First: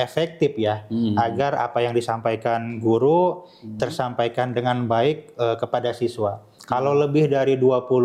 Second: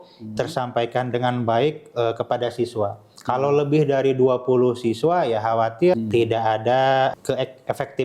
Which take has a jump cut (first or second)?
second